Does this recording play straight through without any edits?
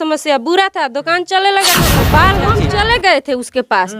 no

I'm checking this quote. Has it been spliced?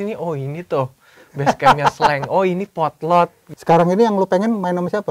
yes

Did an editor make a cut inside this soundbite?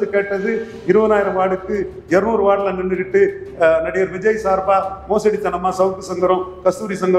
no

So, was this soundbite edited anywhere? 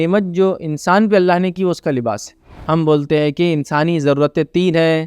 yes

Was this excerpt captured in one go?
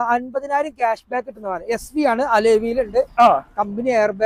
yes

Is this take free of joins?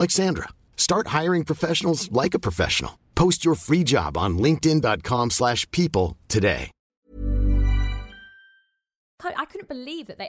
no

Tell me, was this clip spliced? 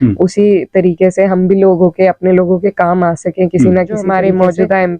yes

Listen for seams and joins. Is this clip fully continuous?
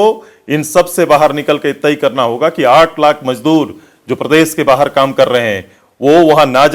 yes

